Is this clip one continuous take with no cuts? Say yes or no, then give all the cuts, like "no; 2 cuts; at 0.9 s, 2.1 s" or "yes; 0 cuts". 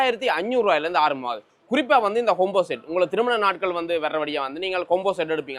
yes; 0 cuts